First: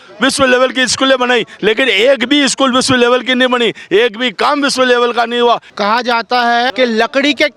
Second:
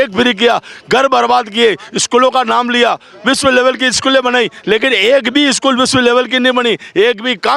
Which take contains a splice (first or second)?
first